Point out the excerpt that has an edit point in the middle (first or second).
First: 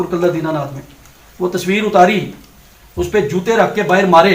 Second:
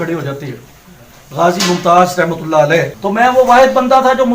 second